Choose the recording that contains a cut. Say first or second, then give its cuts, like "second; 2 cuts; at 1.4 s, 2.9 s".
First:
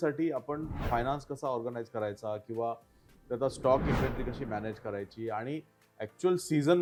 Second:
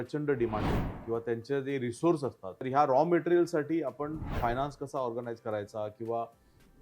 second; 1 cut; at 2.5 s